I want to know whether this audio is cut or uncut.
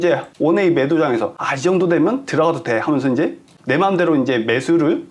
cut